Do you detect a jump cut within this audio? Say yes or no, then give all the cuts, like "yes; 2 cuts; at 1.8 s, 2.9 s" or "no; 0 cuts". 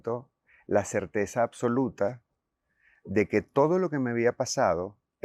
no; 0 cuts